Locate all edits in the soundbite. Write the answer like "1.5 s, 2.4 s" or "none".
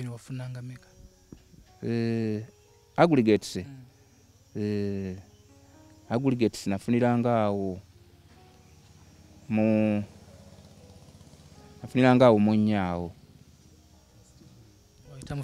none